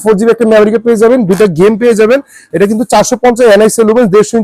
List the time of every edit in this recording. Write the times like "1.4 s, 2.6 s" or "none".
none